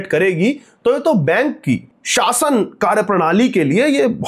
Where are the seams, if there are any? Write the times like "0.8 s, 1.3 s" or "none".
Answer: 2.0 s